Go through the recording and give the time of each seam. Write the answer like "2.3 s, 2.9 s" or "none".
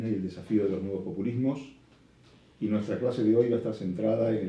1.3 s